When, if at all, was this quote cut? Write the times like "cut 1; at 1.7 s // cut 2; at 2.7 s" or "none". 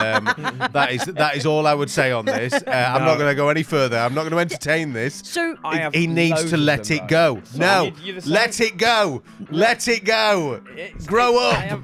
none